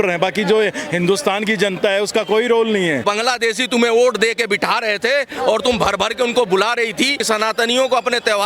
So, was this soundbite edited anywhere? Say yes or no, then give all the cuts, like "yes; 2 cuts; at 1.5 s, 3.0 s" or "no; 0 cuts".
yes; 2 cuts; at 3.0 s, 7.2 s